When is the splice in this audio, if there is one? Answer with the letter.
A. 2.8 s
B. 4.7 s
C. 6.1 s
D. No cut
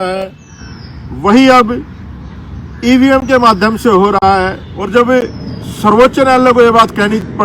B